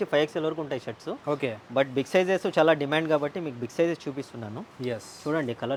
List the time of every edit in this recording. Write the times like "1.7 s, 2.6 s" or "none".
none